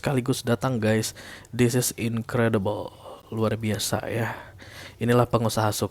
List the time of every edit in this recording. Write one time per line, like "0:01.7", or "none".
none